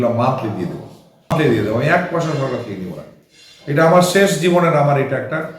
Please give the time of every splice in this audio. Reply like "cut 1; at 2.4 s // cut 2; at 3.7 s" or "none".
cut 1; at 1.3 s